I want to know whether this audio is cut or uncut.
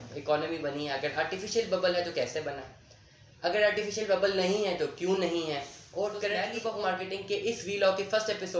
cut